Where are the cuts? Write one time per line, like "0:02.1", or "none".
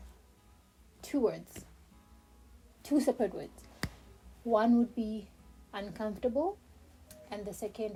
none